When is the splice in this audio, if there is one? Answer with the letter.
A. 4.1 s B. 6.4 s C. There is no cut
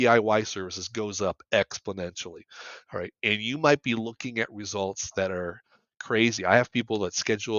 C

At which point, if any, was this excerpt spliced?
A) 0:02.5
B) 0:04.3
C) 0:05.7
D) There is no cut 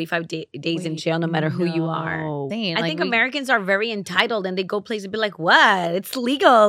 A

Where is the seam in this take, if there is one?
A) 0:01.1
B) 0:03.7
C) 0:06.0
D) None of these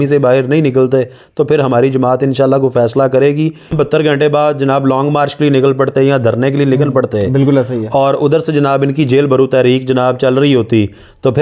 B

